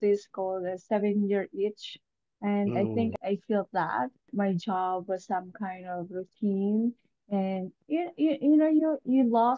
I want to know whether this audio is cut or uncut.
cut